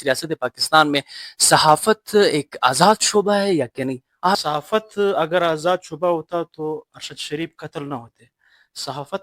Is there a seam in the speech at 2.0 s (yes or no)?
no